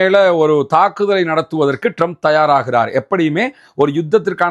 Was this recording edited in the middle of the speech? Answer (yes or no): no